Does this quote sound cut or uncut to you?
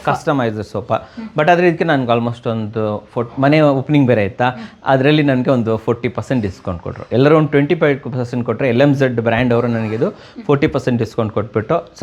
uncut